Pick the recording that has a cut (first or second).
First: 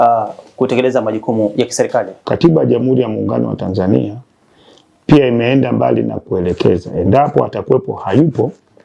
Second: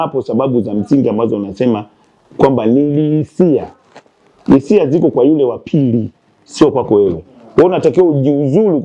first